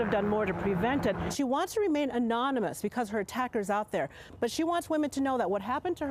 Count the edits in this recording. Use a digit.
2